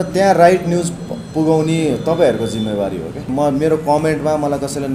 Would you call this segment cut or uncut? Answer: cut